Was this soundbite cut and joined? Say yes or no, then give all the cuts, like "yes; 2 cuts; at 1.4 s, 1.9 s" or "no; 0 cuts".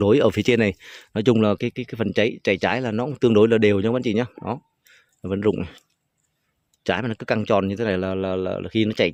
no; 0 cuts